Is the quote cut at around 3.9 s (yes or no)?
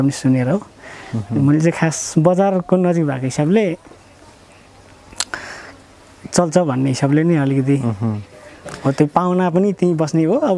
no